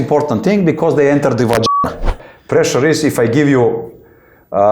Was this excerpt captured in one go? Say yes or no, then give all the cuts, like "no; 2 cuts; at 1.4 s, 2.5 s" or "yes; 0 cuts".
no; 1 cut; at 2.1 s